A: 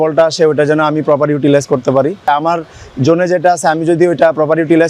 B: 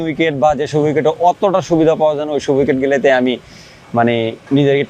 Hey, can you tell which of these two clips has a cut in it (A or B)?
A